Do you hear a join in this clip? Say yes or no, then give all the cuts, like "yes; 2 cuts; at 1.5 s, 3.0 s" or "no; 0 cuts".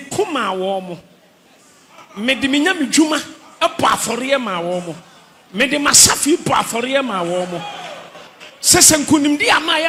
no; 0 cuts